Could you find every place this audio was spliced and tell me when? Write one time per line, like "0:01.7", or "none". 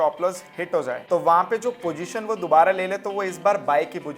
0:01.0